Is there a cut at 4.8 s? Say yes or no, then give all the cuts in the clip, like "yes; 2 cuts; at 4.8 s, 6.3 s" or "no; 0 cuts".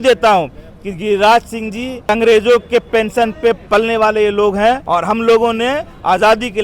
yes; 2 cuts; at 2.1 s, 4.8 s